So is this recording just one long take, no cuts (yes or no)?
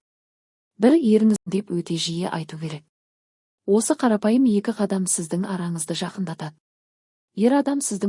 no